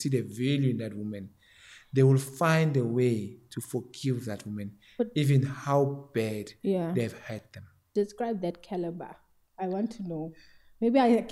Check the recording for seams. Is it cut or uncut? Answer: cut